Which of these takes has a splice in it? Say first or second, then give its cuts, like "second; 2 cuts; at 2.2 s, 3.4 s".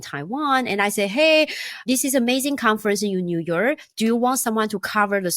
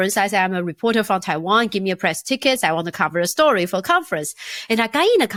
first; 1 cut; at 1.8 s